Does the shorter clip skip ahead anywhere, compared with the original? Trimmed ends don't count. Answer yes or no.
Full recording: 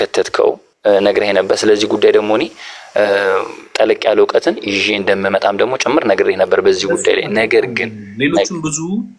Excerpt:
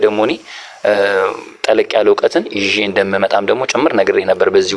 no